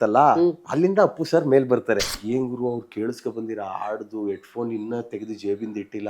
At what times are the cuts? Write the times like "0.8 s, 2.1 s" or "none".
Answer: 2.1 s